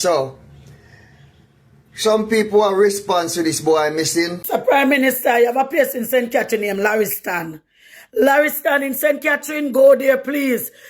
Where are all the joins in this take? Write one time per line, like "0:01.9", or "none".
0:04.4